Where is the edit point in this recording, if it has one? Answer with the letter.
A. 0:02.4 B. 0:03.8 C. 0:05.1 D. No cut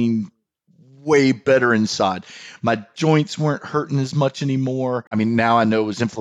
C